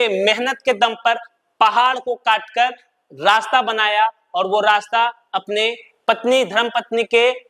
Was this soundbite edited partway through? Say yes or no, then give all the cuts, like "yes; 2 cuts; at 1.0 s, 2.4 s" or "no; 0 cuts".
no; 0 cuts